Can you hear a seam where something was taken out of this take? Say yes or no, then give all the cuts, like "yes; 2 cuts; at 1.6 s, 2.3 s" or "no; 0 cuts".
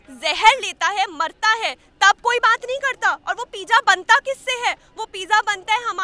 no; 0 cuts